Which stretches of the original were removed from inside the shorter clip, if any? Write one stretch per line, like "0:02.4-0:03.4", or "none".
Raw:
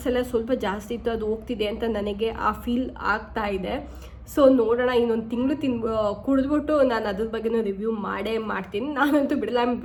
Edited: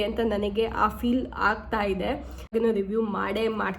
0:04.1-0:07.4